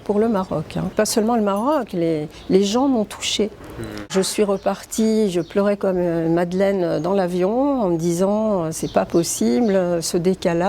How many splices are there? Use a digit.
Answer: 2